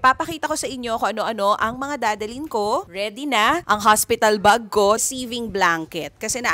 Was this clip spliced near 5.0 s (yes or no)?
yes